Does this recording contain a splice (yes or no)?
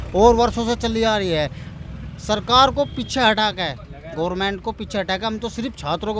no